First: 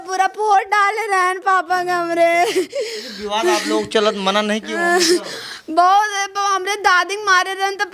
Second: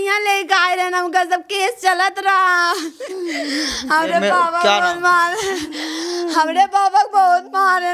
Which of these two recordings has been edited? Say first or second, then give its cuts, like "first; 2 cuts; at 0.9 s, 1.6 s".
second; 1 cut; at 3.1 s